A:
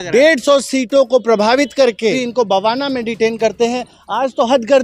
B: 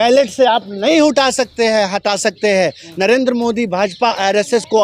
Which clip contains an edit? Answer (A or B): A